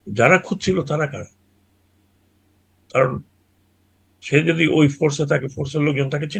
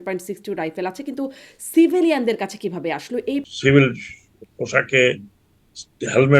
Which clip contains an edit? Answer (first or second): second